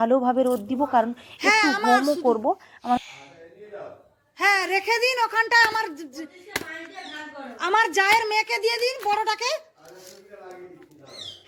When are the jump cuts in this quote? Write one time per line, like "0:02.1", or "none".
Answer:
none